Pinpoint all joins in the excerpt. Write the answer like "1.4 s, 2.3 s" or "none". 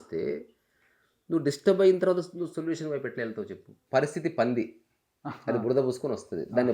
3.7 s